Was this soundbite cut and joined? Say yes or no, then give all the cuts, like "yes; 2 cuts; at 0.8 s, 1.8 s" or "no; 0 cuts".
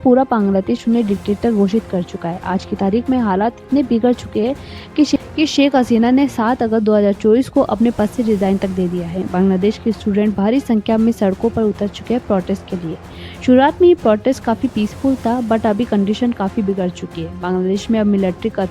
no; 0 cuts